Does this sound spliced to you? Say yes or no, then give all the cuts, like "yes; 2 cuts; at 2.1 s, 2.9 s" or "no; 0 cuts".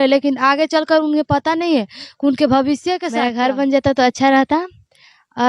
yes; 1 cut; at 3.1 s